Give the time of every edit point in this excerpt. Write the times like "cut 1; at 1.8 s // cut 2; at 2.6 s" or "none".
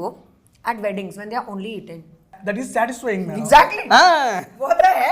cut 1; at 2.4 s